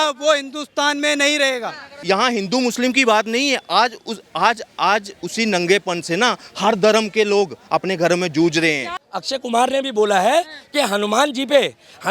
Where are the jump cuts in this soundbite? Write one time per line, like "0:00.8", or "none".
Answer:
0:02.0
0:08.9